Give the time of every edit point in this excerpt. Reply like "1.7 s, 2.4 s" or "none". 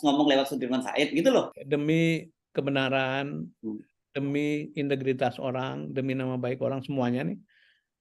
1.5 s